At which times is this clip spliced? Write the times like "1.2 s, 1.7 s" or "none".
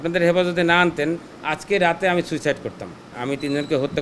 3.1 s